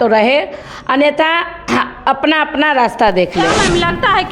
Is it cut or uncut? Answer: uncut